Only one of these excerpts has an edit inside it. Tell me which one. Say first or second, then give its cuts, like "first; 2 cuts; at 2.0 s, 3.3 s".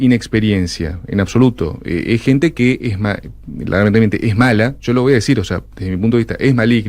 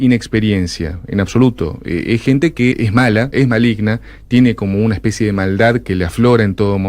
second; 1 cut; at 3.3 s